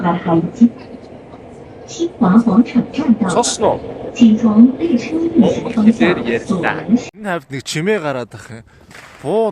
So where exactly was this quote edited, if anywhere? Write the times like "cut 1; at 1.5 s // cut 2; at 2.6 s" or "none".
cut 1; at 7.0 s